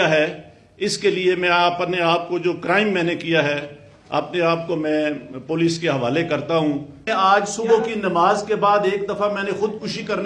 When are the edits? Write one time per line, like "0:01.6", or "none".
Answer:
0:07.1

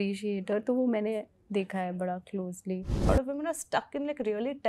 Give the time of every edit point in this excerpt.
0:03.1

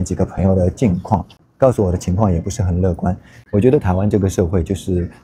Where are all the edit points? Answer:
0:03.3

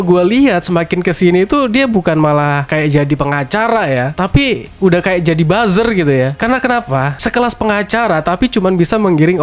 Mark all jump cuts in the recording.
none

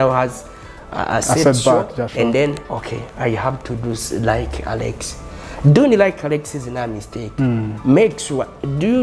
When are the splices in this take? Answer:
none

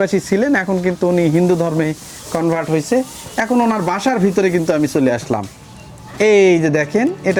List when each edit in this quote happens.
none

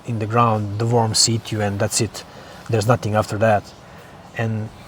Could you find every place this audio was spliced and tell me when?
none

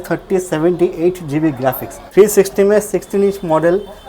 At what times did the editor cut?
0:01.9

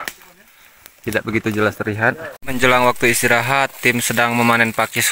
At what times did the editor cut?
0:02.3

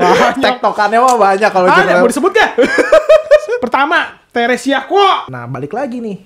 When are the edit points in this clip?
0:05.3

